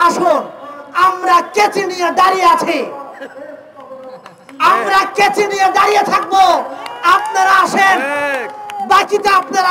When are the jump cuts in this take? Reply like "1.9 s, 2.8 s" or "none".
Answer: none